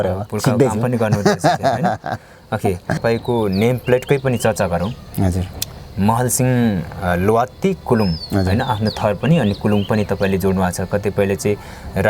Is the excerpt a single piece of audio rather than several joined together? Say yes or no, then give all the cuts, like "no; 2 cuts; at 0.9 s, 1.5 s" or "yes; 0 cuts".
no; 1 cut; at 3.0 s